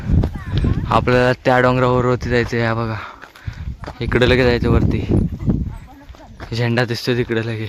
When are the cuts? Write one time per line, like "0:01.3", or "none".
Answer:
none